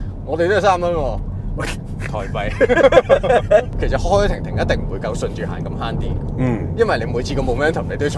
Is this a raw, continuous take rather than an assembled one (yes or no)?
no